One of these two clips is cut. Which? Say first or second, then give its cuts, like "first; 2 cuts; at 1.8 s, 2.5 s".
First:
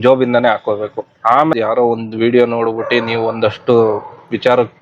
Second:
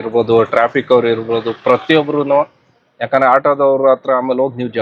first; 1 cut; at 1.5 s